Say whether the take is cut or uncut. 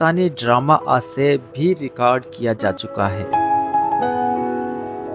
uncut